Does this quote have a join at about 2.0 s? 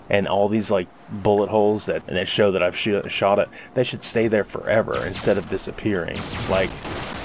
yes; 1 cut; at 2.0 s

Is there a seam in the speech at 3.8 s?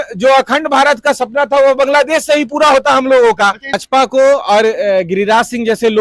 yes; 1 cut; at 3.8 s

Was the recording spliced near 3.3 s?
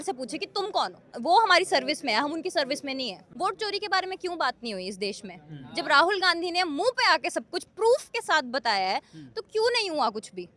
yes; 2 cuts; at 1.1 s, 3.3 s

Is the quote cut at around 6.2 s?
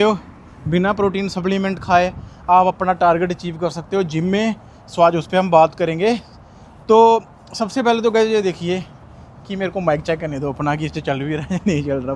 no; 0 cuts

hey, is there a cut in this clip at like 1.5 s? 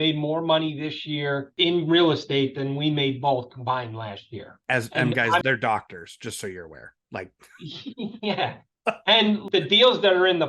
yes; 3 cuts; at 1.5 s, 4.6 s, 5.4 s

